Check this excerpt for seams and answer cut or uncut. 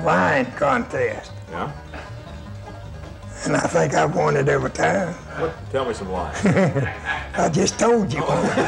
uncut